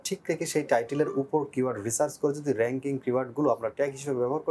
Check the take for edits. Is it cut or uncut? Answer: uncut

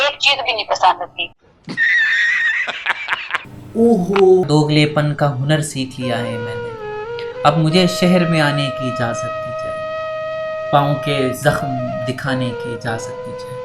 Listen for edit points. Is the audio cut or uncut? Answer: cut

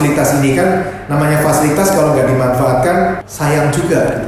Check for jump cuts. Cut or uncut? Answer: cut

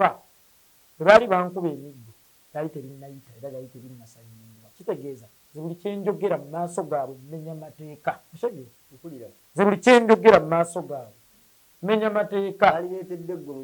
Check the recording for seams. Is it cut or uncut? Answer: cut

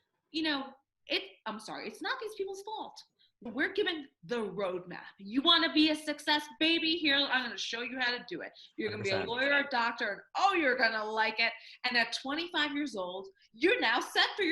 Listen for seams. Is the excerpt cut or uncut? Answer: cut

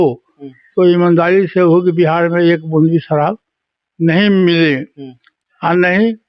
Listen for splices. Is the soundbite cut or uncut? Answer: uncut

